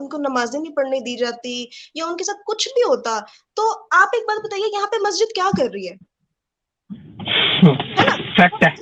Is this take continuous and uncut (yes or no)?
yes